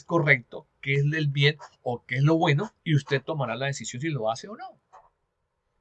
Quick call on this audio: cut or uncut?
cut